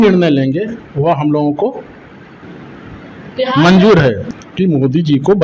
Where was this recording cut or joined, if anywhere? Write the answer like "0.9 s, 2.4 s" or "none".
4.2 s

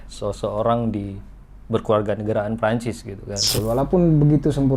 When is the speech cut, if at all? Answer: 3.5 s

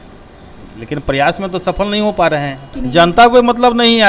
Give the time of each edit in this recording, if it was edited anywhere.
2.8 s

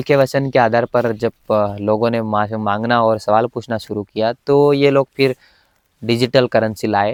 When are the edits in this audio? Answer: none

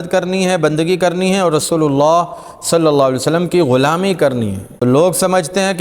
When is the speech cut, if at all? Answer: 4.6 s

